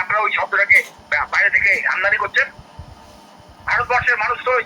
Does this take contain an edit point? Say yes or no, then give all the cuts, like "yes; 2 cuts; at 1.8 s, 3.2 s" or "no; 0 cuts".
no; 0 cuts